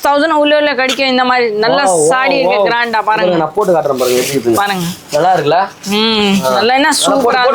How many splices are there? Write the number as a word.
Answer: zero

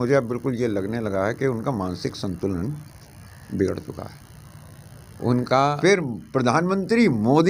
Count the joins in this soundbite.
one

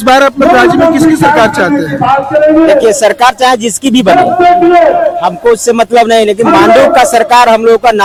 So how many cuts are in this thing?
zero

